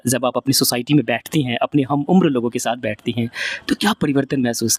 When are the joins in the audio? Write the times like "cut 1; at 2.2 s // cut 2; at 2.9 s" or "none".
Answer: none